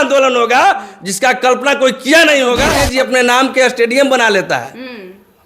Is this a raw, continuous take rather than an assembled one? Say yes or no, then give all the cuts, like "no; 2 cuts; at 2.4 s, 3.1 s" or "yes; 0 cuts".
no; 1 cut; at 2.8 s